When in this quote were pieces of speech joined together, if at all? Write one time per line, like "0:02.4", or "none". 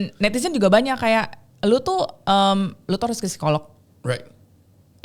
none